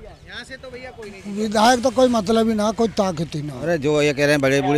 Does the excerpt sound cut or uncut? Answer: cut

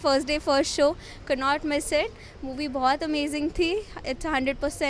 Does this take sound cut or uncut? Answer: uncut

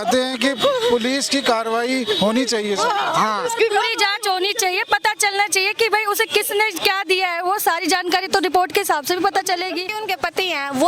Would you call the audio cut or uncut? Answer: cut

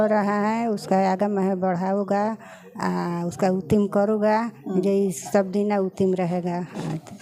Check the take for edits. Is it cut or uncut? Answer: uncut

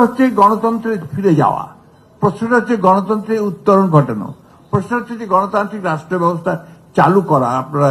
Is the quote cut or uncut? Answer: uncut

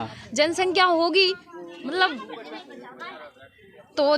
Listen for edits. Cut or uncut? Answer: uncut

